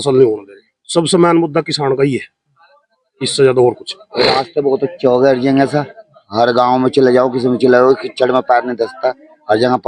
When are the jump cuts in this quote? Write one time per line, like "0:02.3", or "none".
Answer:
none